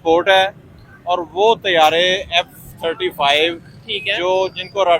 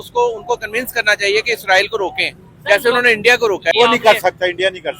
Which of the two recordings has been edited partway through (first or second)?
second